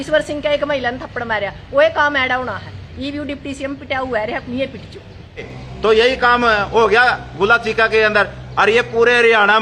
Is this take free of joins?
no; 1 cut; at 5.6 s

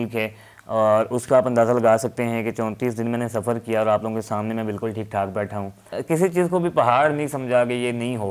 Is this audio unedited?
no; 1 cut; at 5.9 s

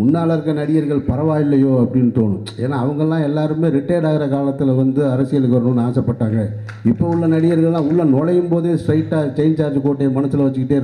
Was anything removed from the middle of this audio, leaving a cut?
no; 0 cuts

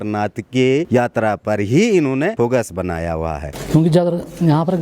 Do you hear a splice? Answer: yes; 3 cuts; at 0.9 s, 2.3 s, 3.5 s

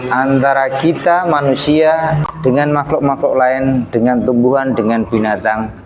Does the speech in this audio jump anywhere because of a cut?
yes; 1 cut; at 2.3 s

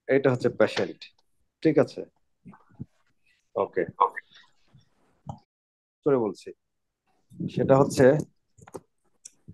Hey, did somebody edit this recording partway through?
yes; 1 cut; at 5.7 s

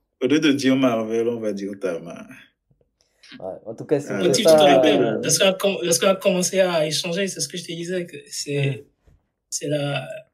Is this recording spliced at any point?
no; 0 cuts

